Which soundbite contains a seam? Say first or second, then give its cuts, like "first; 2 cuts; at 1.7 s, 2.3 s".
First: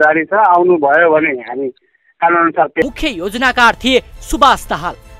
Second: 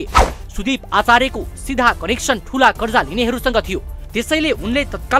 first; 1 cut; at 2.8 s